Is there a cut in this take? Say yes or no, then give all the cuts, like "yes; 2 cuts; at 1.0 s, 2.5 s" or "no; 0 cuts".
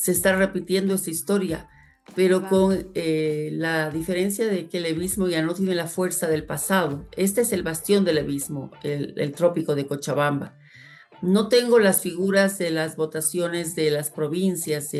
no; 0 cuts